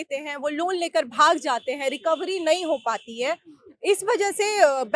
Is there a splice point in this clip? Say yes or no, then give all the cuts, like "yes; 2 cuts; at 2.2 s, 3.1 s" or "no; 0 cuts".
no; 0 cuts